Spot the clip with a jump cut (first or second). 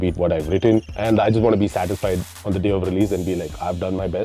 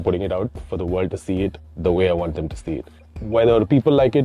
first